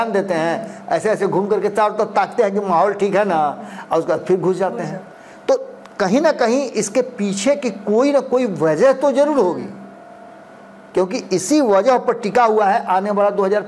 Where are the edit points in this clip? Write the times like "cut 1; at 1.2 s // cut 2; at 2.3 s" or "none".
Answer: none